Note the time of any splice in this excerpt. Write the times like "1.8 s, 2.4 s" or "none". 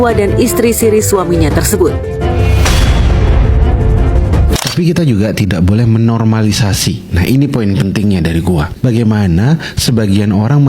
4.6 s